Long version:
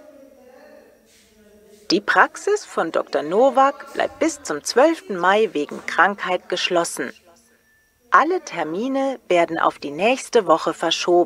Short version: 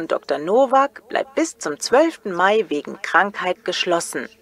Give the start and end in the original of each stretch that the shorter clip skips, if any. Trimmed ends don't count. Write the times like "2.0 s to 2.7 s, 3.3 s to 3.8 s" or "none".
none